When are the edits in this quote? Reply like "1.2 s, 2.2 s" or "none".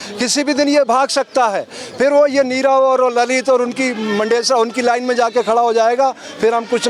none